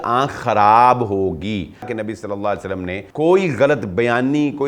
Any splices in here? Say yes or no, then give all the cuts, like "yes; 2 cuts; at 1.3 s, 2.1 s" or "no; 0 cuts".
yes; 2 cuts; at 1.9 s, 3.0 s